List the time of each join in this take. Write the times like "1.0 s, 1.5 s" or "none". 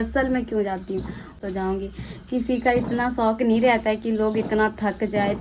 1.3 s